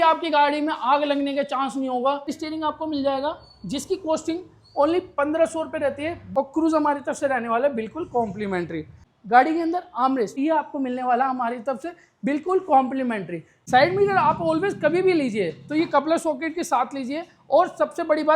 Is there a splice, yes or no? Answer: yes